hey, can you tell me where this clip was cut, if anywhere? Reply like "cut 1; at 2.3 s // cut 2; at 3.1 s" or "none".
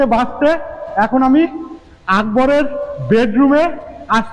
none